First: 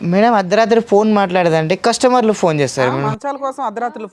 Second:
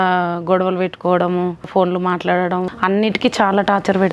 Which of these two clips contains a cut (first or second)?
second